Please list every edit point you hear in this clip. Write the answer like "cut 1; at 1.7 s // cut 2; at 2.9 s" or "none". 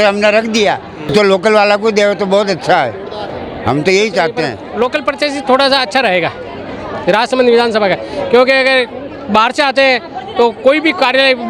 cut 1; at 1.1 s // cut 2; at 4.6 s